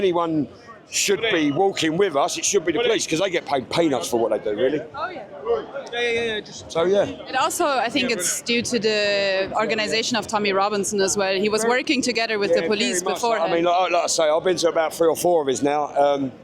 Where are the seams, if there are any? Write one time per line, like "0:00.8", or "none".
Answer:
none